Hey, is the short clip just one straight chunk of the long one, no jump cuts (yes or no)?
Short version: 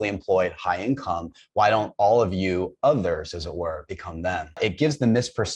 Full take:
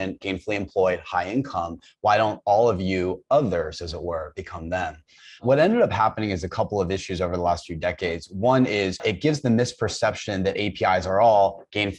no